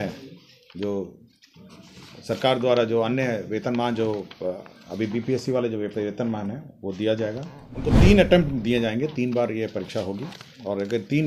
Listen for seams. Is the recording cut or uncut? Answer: cut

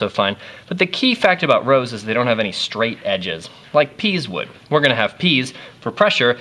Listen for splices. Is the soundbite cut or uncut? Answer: cut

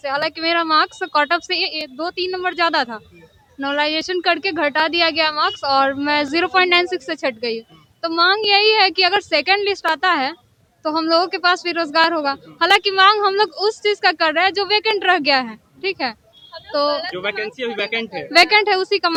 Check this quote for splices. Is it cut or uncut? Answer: uncut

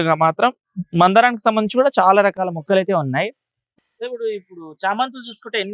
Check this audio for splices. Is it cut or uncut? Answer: cut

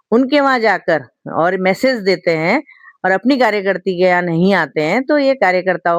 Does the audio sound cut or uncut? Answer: uncut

